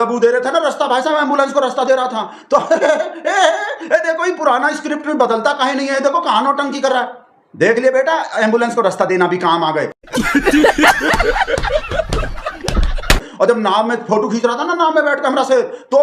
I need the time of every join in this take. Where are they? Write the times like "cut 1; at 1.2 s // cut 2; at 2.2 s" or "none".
none